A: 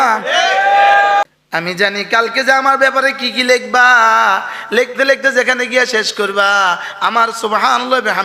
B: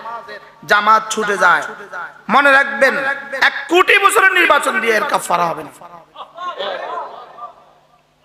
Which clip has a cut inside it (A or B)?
A